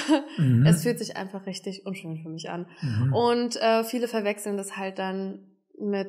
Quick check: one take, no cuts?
yes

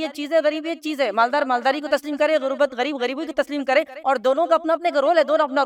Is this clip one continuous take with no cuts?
yes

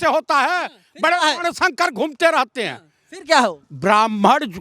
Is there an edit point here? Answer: no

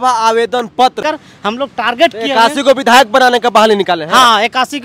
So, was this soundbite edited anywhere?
yes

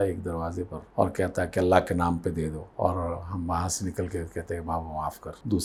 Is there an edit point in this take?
no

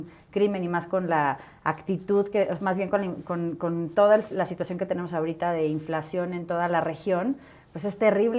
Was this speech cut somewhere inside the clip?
no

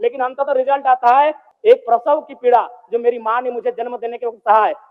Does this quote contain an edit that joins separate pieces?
yes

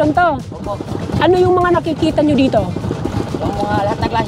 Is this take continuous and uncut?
no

